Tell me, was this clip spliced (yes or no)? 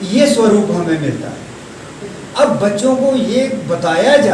no